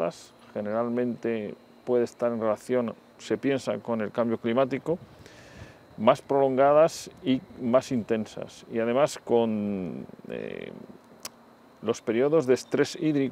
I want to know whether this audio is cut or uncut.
uncut